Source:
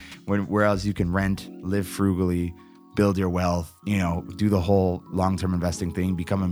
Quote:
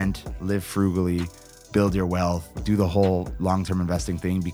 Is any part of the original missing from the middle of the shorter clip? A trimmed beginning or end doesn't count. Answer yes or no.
yes